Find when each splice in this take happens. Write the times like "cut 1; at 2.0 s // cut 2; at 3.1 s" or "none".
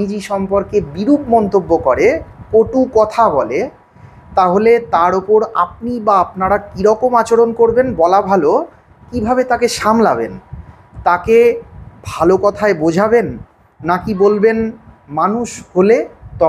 none